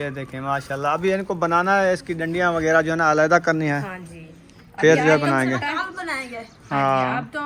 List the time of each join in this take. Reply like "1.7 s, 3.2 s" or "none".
none